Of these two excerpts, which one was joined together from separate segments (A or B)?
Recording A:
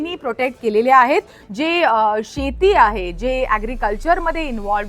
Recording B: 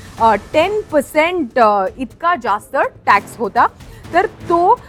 A